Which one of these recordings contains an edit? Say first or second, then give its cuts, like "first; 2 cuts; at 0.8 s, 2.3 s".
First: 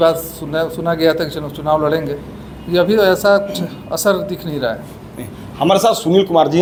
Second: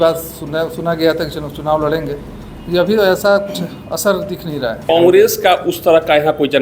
second; 1 cut; at 4.9 s